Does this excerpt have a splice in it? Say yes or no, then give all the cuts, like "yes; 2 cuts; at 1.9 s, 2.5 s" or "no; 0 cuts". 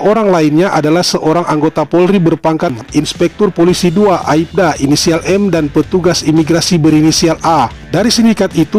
yes; 1 cut; at 7.8 s